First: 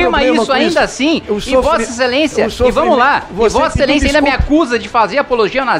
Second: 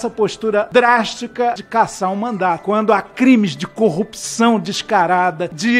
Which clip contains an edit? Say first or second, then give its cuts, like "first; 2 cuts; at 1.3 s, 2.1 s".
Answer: second; 1 cut; at 1.6 s